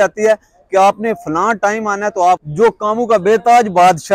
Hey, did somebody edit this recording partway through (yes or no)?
yes